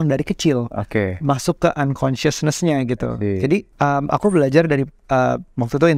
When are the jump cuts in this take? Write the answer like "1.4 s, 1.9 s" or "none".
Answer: none